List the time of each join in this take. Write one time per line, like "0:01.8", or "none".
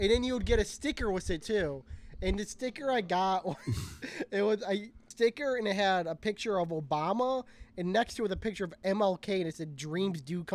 0:05.1